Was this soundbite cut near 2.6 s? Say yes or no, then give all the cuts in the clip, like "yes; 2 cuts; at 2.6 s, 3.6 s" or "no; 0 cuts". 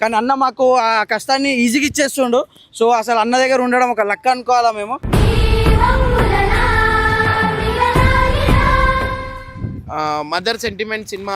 no; 1 cut; at 9.3 s